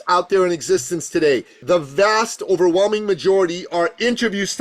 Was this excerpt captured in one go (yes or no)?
no